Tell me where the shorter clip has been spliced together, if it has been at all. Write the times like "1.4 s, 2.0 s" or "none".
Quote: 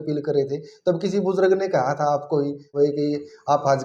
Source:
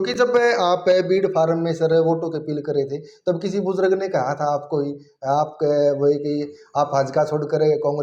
2.7 s